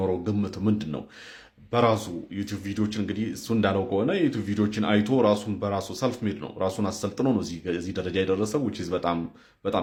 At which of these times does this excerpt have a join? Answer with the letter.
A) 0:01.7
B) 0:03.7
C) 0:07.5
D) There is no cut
D